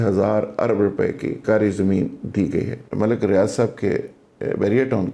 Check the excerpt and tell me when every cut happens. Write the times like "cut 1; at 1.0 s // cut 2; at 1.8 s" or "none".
cut 1; at 1.4 s // cut 2; at 2.8 s